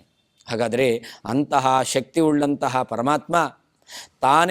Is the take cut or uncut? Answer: uncut